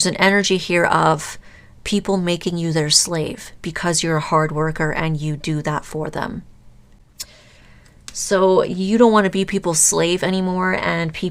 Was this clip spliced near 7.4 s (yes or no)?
yes